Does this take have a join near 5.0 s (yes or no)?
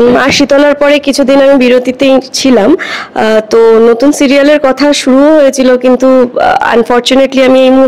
no